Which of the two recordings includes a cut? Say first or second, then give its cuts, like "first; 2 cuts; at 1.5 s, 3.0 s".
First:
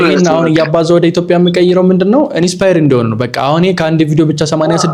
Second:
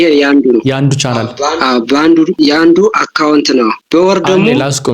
second; 2 cuts; at 2.3 s, 3.8 s